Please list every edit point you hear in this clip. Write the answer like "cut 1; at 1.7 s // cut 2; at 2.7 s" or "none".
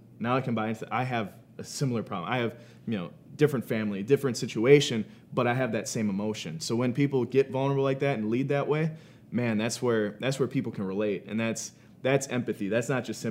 none